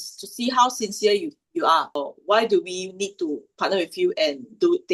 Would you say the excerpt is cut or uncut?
cut